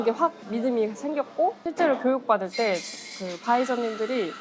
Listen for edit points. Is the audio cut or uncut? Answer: cut